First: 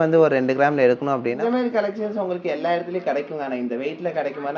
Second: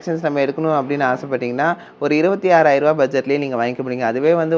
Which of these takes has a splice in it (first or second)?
first